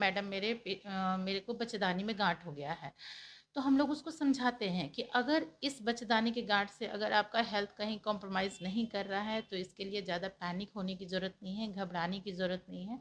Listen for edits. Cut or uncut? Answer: uncut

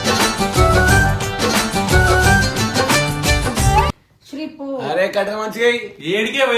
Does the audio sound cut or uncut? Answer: cut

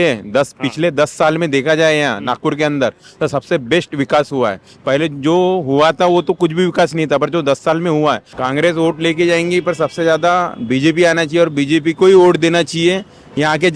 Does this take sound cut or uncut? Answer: cut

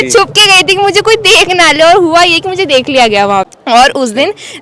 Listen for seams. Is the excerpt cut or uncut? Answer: cut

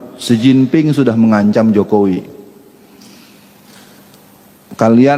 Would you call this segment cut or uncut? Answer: uncut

